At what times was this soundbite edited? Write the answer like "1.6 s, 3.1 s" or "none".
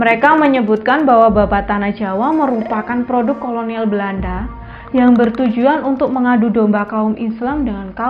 none